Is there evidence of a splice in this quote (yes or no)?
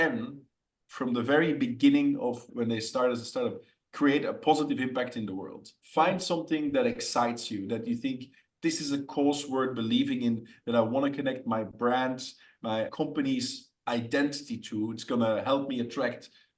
yes